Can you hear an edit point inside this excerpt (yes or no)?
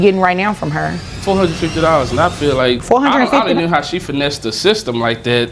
yes